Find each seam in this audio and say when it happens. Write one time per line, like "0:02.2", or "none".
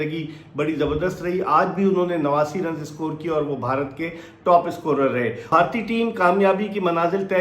0:05.5